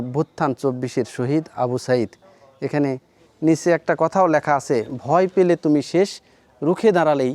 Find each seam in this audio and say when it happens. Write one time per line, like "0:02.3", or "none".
none